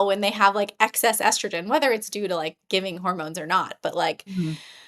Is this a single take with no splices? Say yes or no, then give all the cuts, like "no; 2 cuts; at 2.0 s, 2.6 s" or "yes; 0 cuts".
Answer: yes; 0 cuts